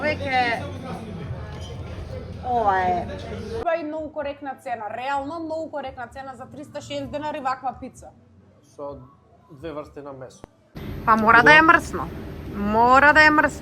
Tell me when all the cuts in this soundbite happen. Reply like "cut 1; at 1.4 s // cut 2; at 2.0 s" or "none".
cut 1; at 3.6 s // cut 2; at 10.7 s